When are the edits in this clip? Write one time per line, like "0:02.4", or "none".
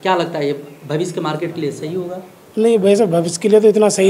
none